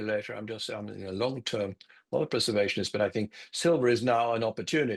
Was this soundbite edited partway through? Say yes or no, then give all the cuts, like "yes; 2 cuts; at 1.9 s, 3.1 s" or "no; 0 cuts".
no; 0 cuts